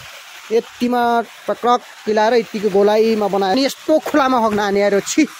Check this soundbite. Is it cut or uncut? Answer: cut